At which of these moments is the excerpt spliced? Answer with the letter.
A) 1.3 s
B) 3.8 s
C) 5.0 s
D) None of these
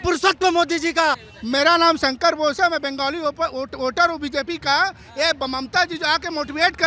A